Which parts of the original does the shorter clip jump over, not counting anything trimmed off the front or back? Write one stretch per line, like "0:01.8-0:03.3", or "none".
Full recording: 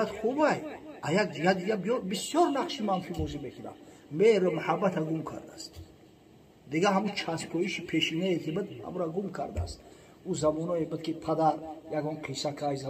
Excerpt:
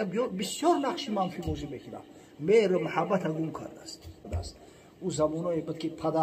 0:06.0-0:09.5